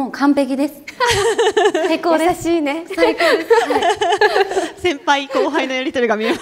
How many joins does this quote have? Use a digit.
0